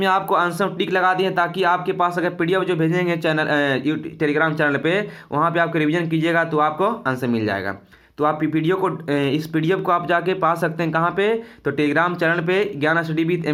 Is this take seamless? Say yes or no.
yes